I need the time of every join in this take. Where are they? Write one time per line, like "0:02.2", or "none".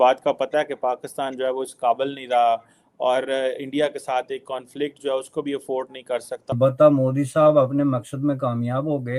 0:06.4